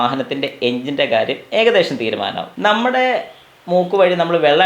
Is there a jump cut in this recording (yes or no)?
yes